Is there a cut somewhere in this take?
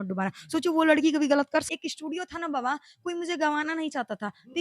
yes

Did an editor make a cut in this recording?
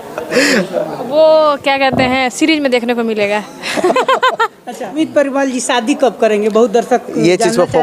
yes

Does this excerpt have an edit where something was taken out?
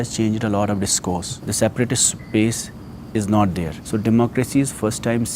yes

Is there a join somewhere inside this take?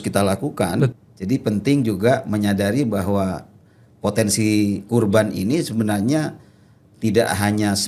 yes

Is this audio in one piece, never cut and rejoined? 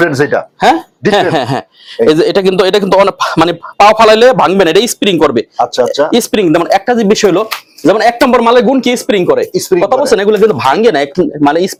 yes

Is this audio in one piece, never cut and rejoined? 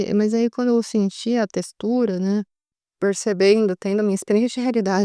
no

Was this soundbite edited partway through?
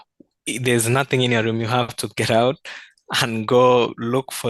no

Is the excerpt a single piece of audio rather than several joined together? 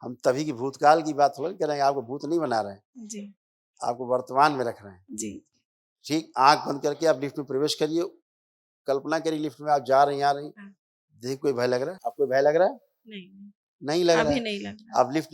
no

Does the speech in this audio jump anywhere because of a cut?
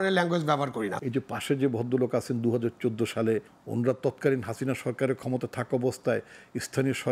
yes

